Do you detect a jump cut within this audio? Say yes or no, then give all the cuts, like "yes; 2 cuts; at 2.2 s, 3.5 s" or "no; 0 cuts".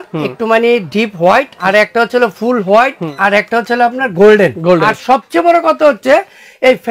yes; 3 cuts; at 1.6 s, 3.0 s, 4.9 s